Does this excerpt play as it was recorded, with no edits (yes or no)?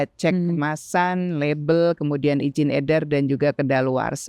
yes